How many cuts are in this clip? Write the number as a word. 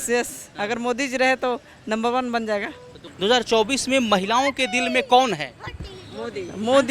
one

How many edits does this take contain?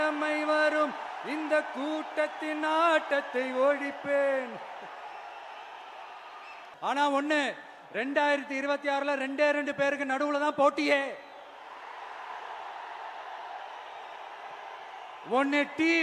one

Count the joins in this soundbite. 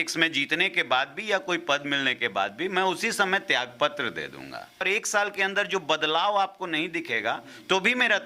one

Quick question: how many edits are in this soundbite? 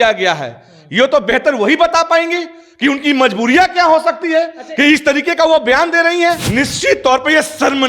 one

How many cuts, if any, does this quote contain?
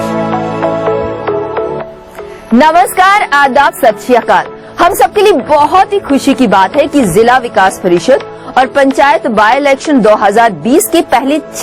one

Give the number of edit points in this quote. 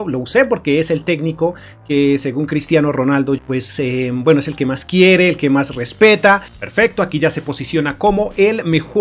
two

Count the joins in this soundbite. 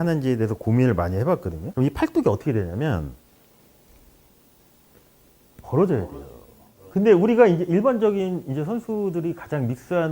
one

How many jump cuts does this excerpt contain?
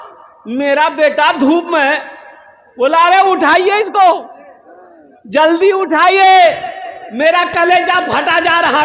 zero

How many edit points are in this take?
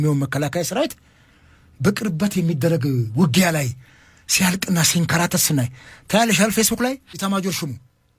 one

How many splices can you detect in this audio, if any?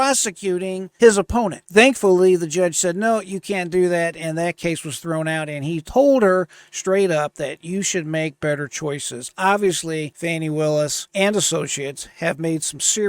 four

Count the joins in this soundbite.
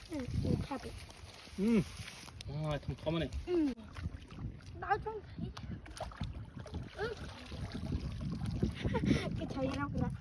one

